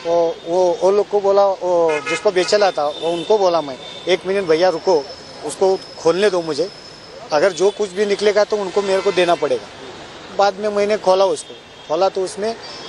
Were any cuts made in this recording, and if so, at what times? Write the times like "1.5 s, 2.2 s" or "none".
10.3 s